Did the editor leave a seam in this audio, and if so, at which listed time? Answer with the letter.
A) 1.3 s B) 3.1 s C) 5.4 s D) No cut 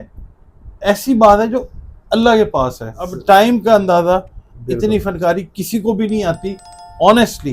B